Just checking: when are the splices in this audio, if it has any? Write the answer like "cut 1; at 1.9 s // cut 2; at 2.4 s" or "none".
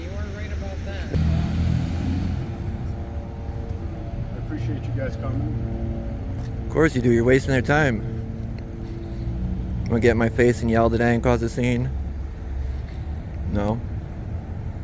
cut 1; at 1.1 s

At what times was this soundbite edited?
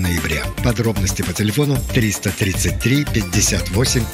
none

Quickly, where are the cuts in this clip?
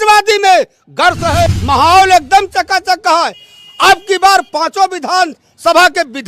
cut 1; at 1.3 s

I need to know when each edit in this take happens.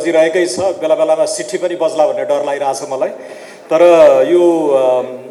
none

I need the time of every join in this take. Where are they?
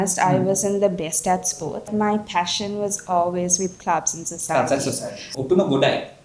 cut 1; at 1.9 s // cut 2; at 5.3 s

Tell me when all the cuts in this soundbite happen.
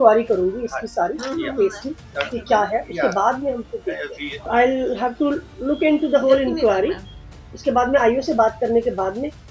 cut 1; at 4.5 s

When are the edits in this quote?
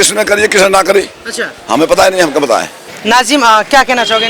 cut 1; at 2.9 s

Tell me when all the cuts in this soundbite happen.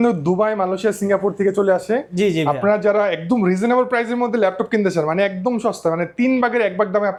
none

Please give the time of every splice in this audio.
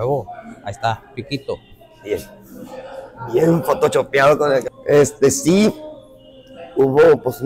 none

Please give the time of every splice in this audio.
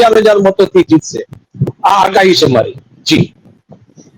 none

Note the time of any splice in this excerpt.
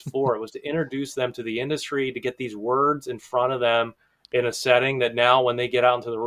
none

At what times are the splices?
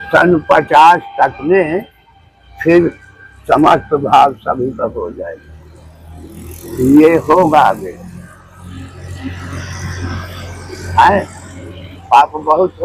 none

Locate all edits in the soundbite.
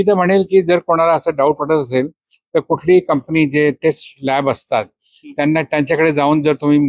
none

